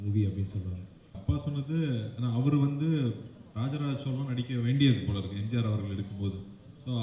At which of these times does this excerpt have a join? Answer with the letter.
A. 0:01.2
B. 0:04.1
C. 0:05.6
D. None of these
A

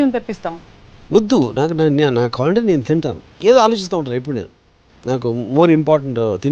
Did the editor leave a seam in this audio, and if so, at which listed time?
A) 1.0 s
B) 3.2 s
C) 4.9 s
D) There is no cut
B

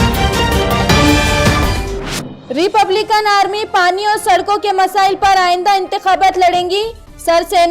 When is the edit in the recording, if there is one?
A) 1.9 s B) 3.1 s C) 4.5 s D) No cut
A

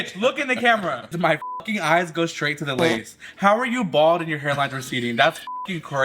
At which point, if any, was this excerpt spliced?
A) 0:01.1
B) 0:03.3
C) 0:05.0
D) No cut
A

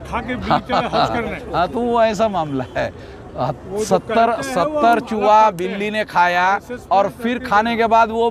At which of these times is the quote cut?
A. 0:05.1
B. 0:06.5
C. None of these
C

